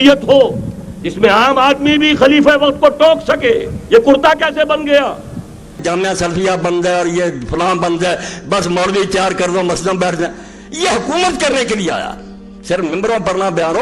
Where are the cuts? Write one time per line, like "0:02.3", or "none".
0:05.8

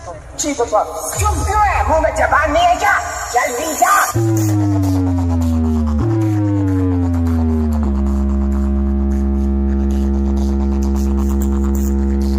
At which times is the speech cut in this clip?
none

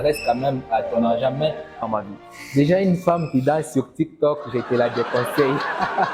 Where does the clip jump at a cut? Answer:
0:01.6

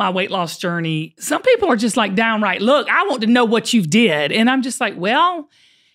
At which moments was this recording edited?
0:01.1

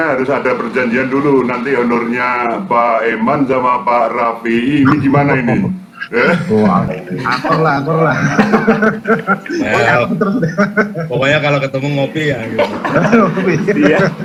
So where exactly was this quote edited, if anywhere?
none

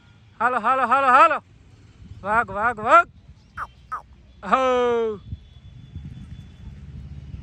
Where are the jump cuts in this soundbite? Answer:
none

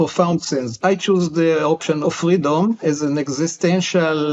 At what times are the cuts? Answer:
0:00.8
0:02.0

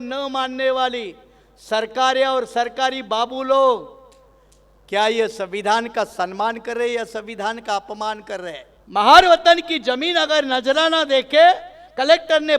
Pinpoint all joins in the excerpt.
0:08.7

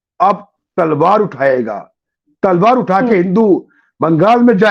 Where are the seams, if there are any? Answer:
none

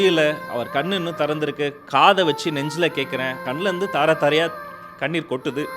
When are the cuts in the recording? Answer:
0:03.5

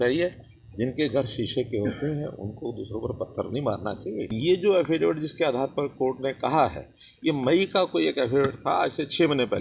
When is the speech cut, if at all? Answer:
0:04.4

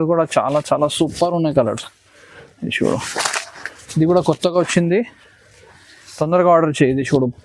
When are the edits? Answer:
none

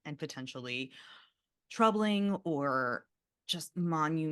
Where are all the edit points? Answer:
0:03.1

